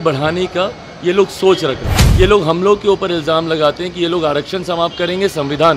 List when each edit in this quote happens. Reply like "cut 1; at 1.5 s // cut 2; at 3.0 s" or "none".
cut 1; at 2.0 s